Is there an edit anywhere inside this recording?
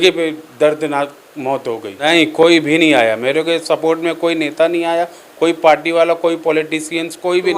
yes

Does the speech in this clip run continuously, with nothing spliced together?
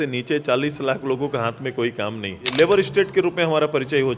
no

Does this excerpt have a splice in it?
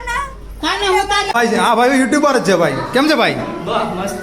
yes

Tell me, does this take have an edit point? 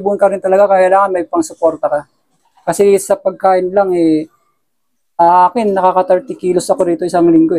no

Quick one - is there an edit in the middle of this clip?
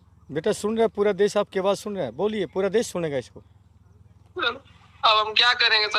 no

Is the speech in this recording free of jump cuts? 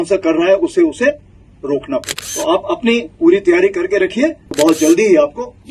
no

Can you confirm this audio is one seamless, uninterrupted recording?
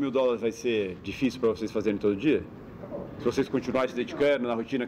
yes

